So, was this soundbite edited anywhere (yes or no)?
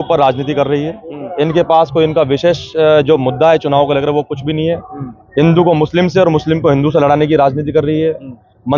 no